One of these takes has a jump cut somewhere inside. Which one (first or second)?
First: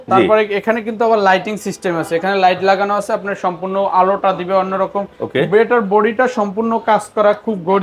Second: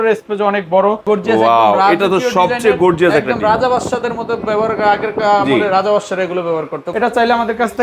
second